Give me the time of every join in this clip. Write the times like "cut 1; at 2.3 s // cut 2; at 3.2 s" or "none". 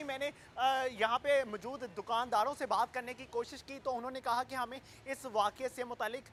none